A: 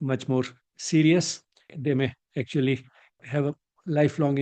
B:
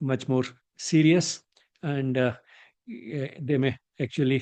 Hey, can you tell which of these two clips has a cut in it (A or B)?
A